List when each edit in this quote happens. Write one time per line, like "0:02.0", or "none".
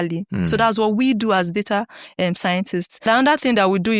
0:03.1

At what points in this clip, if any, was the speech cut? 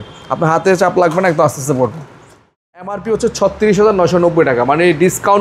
0:02.6

